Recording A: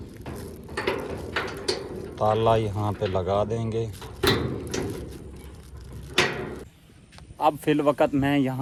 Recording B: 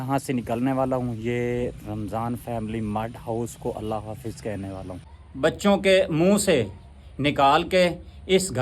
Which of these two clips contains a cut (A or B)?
B